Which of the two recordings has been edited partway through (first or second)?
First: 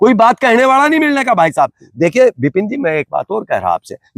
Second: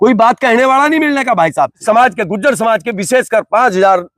second